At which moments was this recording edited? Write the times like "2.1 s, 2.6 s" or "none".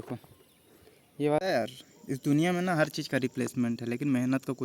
1.4 s